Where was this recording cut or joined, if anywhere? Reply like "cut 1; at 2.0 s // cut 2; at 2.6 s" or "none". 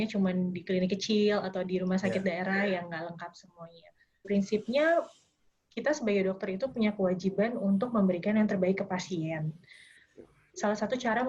cut 1; at 4.3 s